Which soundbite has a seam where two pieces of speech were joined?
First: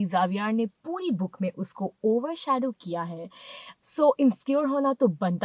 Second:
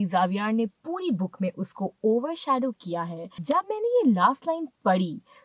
second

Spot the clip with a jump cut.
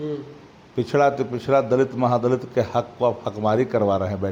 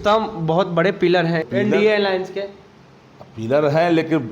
second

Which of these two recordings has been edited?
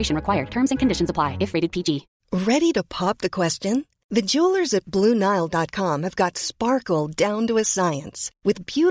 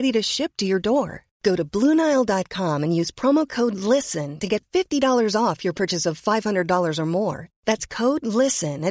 first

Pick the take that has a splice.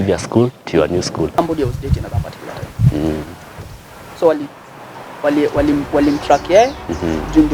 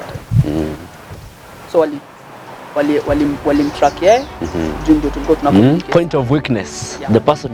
first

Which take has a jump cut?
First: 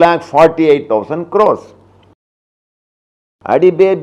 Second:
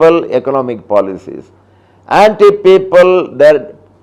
first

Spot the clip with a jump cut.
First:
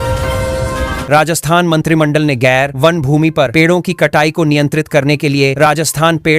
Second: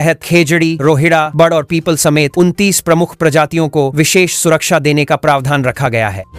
first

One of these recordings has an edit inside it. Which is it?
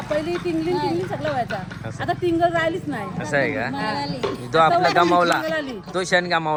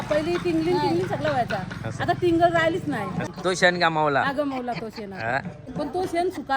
second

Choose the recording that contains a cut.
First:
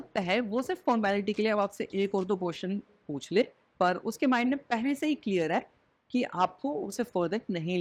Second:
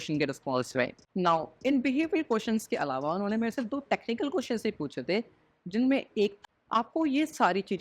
second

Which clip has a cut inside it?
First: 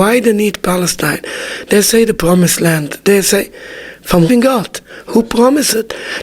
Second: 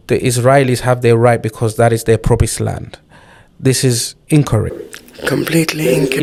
first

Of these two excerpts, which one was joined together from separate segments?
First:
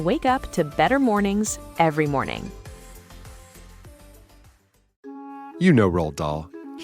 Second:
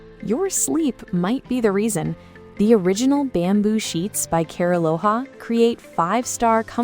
first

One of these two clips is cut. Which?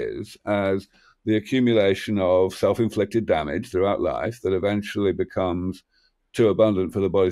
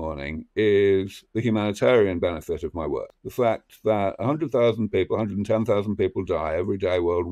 second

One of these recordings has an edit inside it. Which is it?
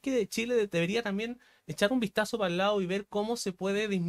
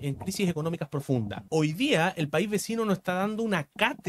second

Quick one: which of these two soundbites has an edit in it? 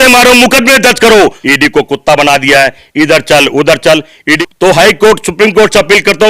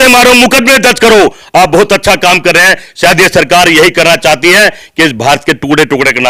first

